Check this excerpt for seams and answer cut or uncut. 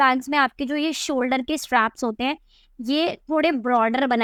uncut